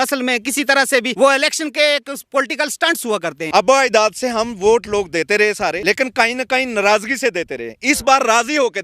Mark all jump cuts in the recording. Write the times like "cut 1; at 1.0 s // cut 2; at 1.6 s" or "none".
cut 1; at 1.1 s // cut 2; at 3.4 s // cut 3; at 5.8 s